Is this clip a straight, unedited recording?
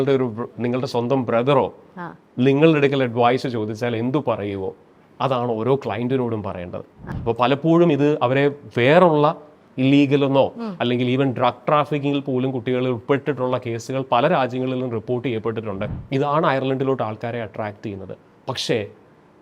no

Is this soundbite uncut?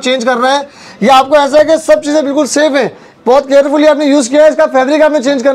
yes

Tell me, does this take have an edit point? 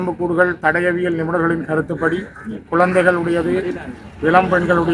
no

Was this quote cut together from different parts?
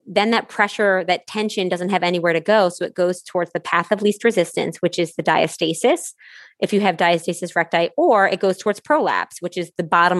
no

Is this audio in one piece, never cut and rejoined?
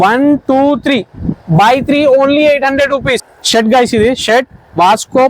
no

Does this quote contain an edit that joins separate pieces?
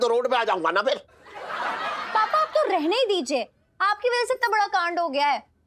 no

